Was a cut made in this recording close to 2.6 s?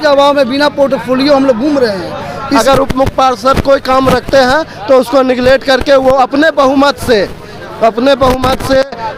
yes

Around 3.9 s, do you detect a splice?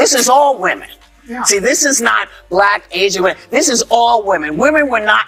no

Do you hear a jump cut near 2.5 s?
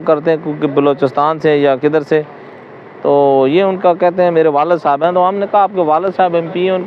no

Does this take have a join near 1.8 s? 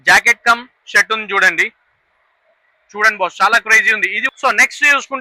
no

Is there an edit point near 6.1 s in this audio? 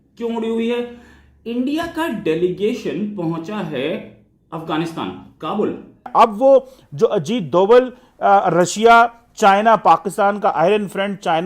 yes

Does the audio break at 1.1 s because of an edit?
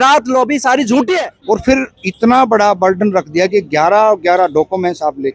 yes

